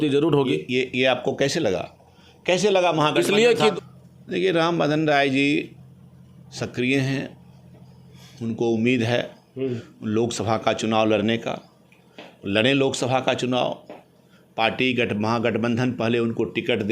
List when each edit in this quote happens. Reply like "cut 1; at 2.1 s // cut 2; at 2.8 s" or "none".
cut 1; at 3.7 s